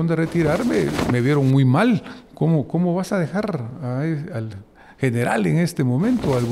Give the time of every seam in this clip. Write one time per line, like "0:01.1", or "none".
none